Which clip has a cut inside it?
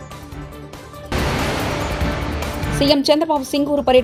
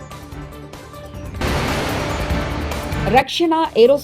second; 2 cuts; at 1.1 s, 3.0 s

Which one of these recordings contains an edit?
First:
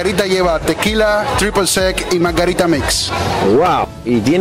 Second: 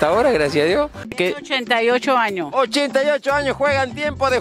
second; 1 cut; at 1.1 s

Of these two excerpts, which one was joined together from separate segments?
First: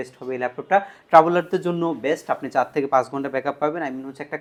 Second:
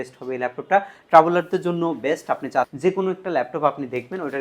second; 1 cut; at 2.7 s

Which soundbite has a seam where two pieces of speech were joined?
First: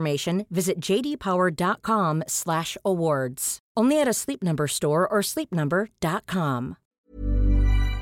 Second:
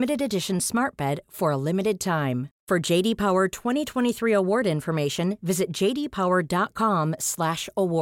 first; 1 cut; at 6.9 s

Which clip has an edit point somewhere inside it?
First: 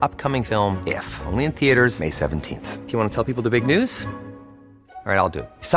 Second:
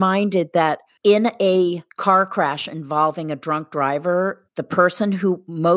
second; 3 cuts; at 0.9 s, 1.9 s, 4.4 s

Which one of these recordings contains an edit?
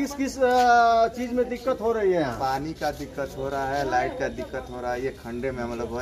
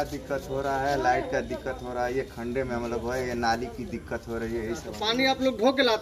second; 1 cut; at 4.9 s

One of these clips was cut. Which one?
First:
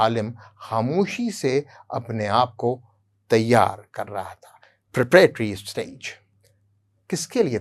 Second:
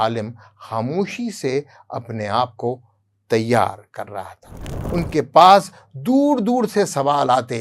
second; 1 cut; at 4.8 s

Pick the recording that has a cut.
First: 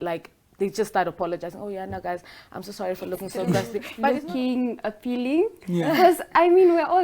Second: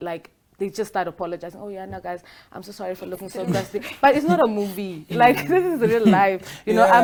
first; 1 cut; at 3.9 s

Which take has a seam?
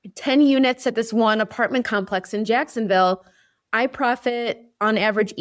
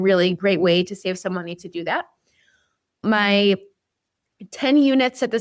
second; 1 cut; at 3.0 s

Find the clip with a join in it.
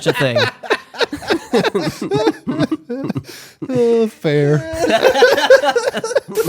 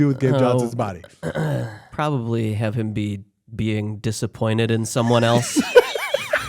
second; 1 cut; at 1.8 s

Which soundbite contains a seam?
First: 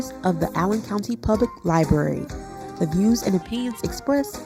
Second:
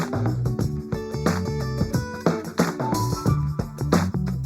second; 1 cut; at 1.3 s

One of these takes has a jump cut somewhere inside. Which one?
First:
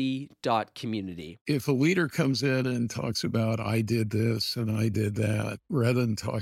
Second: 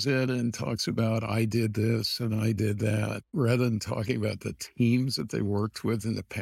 first; 1 cut; at 1.4 s

